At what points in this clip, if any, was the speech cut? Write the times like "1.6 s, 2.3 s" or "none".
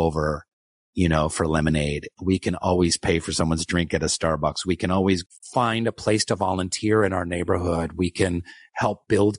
5.2 s